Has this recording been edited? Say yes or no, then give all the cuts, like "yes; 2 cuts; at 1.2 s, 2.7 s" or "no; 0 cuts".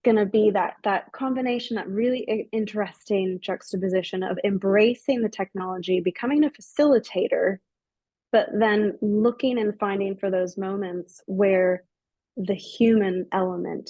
no; 0 cuts